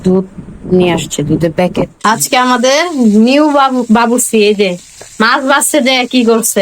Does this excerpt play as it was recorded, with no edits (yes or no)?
no